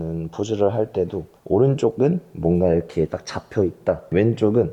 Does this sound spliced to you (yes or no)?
no